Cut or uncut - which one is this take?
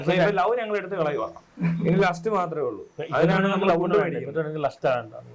uncut